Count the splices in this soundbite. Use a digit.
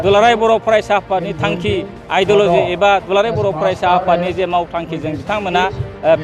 0